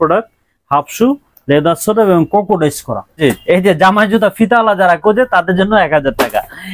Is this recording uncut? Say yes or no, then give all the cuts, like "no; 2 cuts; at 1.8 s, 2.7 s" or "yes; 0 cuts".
no; 1 cut; at 3.2 s